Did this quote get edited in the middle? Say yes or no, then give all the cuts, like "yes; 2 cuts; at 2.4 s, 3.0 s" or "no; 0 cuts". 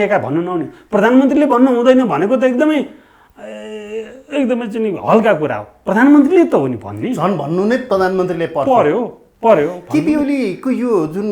no; 0 cuts